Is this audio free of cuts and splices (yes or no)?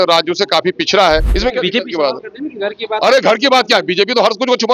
no